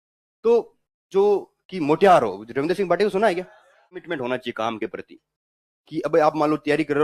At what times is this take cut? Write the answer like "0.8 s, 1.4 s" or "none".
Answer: 4.1 s